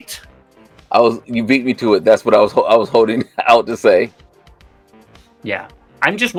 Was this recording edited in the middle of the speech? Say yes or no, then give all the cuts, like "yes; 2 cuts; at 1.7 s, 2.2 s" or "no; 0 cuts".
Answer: no; 0 cuts